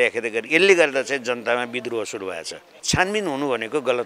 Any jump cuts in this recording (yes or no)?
yes